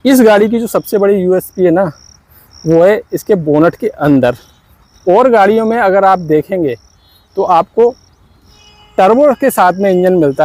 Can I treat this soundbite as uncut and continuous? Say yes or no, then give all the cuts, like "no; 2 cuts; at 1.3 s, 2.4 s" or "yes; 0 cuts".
yes; 0 cuts